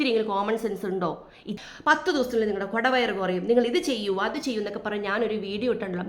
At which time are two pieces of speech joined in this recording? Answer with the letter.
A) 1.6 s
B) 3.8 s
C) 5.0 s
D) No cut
A